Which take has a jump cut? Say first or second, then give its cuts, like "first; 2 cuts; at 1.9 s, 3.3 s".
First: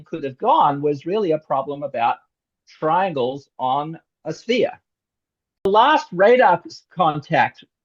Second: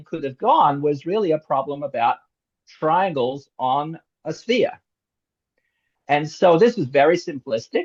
first; 1 cut; at 5.7 s